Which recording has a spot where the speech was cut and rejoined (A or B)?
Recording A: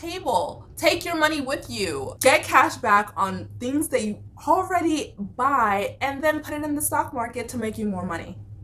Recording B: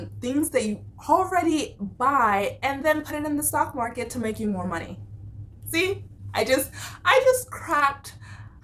A